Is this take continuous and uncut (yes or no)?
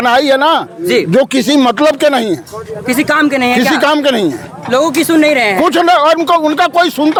yes